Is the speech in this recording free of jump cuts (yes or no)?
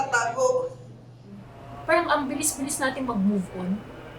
no